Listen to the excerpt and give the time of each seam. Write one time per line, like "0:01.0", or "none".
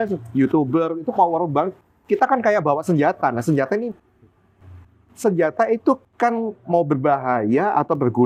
none